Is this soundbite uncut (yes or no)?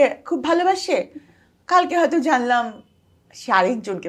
yes